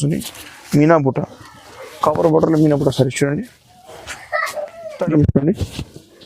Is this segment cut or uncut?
cut